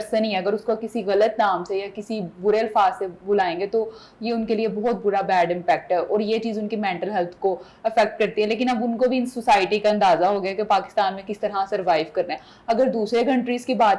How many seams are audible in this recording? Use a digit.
0